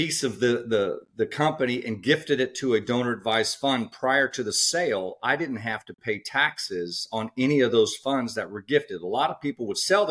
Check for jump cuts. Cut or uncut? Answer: uncut